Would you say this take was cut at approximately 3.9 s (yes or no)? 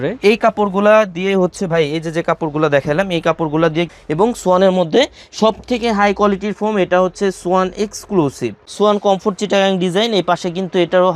yes